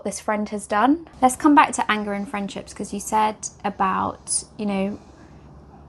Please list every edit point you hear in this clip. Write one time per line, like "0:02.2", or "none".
0:01.1